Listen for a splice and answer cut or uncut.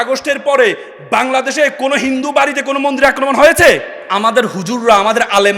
cut